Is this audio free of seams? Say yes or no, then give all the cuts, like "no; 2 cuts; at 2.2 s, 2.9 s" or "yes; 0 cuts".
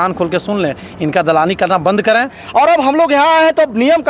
no; 1 cut; at 2.4 s